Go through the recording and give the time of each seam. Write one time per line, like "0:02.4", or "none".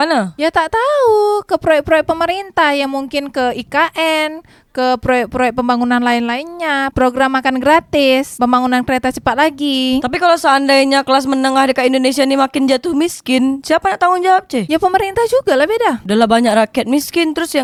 none